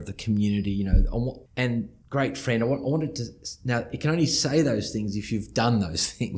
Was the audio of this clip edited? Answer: yes; 1 cut; at 1.7 s

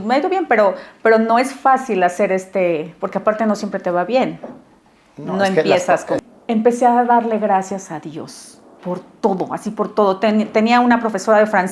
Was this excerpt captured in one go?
no; 1 cut; at 6.2 s

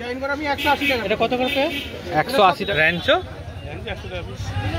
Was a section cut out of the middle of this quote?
yes; 1 cut; at 2.7 s

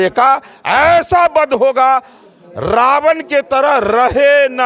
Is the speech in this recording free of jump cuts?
yes; 0 cuts

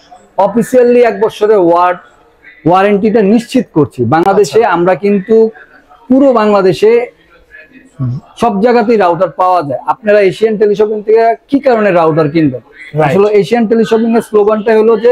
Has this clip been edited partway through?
no; 0 cuts

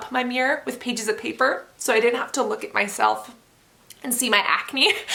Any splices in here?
no; 0 cuts

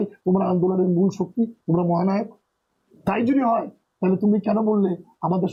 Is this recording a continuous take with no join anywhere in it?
yes; 0 cuts

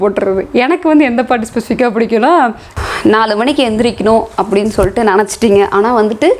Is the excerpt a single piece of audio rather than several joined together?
no; 1 cut; at 2.8 s

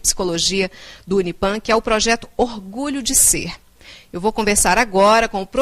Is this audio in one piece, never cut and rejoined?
no; 1 cut; at 2.0 s

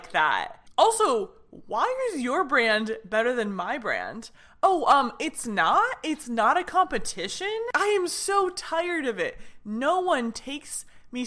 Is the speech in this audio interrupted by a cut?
yes; 1 cut; at 7.7 s

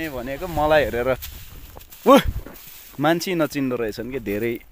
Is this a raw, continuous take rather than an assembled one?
yes; 0 cuts

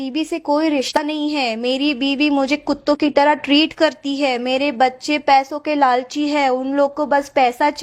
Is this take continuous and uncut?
no; 1 cut; at 1.0 s

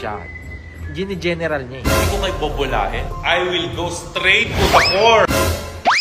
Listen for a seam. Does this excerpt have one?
no; 0 cuts

